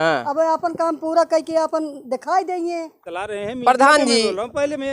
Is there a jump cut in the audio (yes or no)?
yes